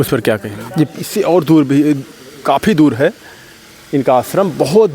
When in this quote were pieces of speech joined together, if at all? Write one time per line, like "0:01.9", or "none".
0:00.9

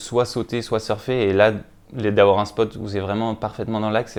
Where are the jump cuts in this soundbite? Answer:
none

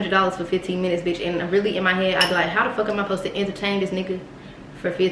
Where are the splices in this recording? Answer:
none

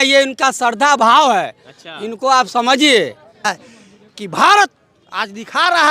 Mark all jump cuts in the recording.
0:03.6

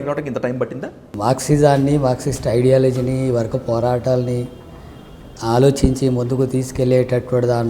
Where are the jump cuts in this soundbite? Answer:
0:01.1

